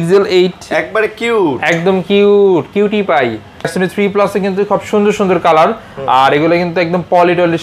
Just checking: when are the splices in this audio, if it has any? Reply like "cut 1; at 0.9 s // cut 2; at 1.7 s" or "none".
cut 1; at 3.7 s

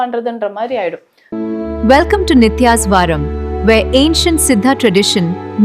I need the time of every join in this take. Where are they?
cut 1; at 1.1 s

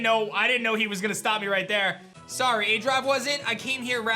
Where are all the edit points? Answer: cut 1; at 2.1 s

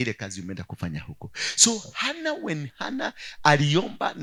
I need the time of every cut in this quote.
none

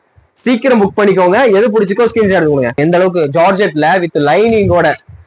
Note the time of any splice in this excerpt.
cut 1; at 2.8 s

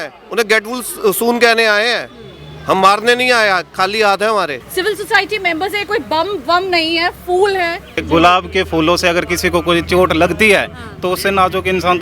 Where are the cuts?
cut 1; at 4.6 s // cut 2; at 8.0 s

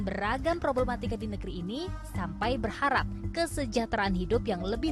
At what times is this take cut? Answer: none

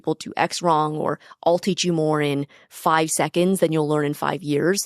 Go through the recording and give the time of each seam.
none

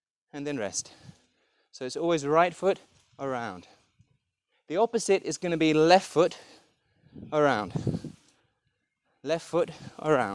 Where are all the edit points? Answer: none

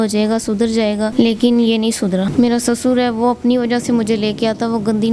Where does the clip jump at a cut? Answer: cut 1; at 1.1 s // cut 2; at 2.3 s

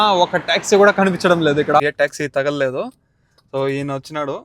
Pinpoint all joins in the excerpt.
cut 1; at 1.8 s

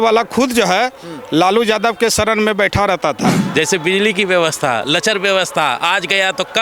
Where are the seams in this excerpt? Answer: cut 1; at 3.4 s

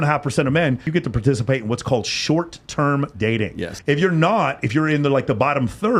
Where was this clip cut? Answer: cut 1; at 0.9 s // cut 2; at 3.7 s

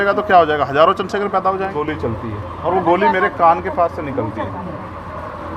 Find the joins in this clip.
cut 1; at 1.7 s

